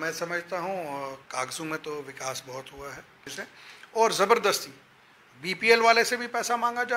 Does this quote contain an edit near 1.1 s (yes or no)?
no